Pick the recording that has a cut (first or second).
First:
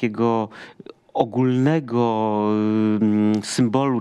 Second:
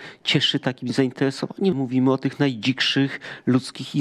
second